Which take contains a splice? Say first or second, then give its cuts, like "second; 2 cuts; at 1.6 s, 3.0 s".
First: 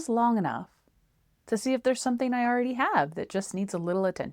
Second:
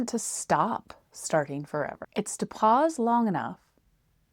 second; 1 cut; at 1.9 s